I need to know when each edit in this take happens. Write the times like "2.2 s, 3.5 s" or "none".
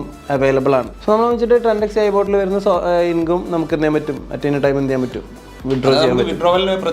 0.9 s